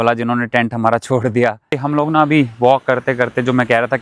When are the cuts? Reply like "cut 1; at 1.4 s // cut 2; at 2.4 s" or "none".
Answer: cut 1; at 1.6 s